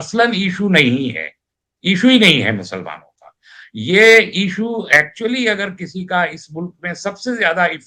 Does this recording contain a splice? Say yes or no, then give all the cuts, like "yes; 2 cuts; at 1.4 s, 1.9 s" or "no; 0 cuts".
no; 0 cuts